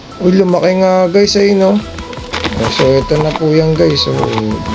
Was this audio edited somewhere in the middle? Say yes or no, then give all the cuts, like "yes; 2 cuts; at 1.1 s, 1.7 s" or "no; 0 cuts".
yes; 1 cut; at 2.4 s